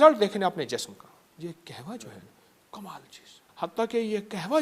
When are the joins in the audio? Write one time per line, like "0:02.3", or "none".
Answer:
0:01.3
0:03.4

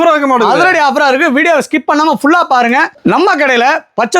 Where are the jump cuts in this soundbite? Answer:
0:02.9

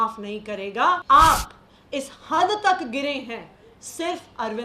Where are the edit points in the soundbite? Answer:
0:01.0

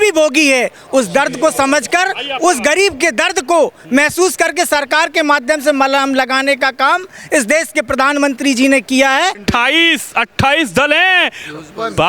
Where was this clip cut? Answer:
0:09.4

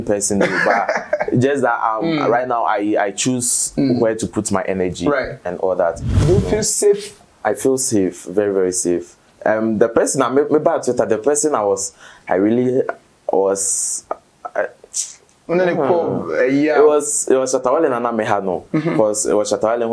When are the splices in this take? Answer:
0:06.1

